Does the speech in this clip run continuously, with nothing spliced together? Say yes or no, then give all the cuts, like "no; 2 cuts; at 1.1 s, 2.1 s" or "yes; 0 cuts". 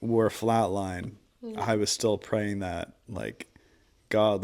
yes; 0 cuts